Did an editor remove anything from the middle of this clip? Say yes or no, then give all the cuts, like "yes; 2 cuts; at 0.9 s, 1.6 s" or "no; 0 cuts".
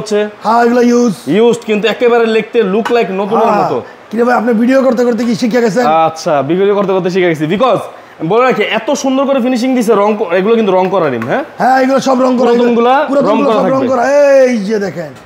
no; 0 cuts